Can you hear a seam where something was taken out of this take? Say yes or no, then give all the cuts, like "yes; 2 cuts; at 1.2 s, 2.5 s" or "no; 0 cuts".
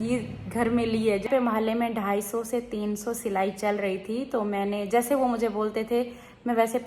yes; 1 cut; at 1.3 s